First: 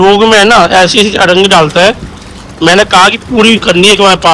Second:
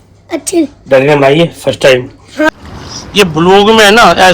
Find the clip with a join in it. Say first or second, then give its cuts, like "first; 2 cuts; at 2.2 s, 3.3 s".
second; 1 cut; at 2.5 s